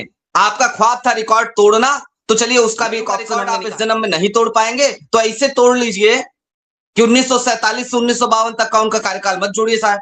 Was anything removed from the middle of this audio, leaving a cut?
yes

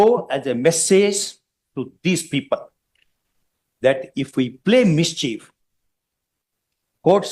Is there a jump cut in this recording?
no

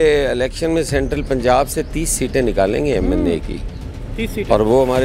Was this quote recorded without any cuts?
yes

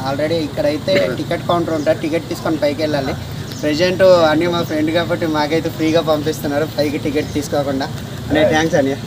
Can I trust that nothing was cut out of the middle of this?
yes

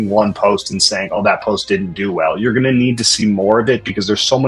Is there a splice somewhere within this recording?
no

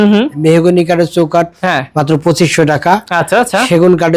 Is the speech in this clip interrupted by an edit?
no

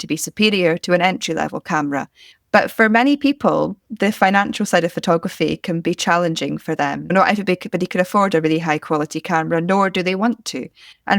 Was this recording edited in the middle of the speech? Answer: yes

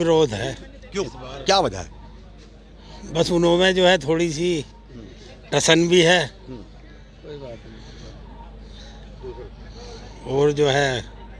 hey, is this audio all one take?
yes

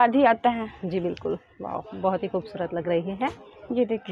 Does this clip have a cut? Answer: no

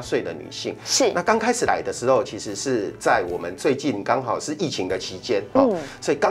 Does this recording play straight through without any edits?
yes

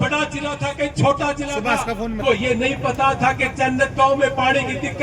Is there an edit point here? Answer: yes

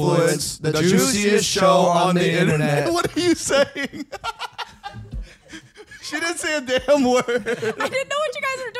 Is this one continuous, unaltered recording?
yes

